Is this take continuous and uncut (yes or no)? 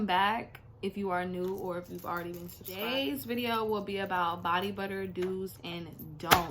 no